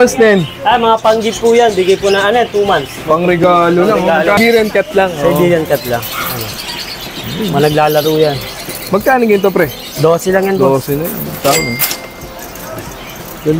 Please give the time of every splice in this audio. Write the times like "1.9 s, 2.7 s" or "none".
4.4 s